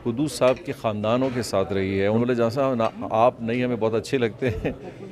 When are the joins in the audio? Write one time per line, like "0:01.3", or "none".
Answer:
0:02.2